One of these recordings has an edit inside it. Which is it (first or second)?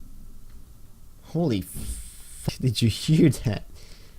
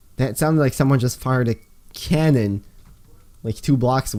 first